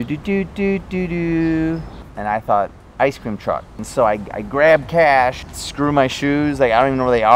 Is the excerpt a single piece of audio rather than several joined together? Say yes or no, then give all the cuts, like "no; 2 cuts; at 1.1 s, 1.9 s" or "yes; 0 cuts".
no; 3 cuts; at 2.0 s, 3.8 s, 5.5 s